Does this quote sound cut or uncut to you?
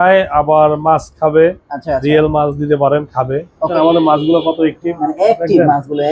cut